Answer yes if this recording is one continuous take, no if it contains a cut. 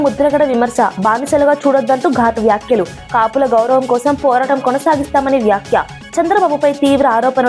yes